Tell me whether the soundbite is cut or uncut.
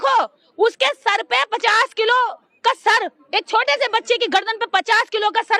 uncut